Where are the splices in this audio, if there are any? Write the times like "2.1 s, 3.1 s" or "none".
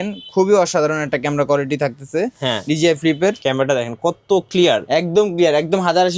3.4 s